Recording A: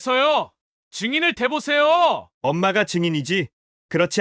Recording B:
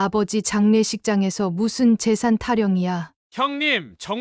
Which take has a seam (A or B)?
B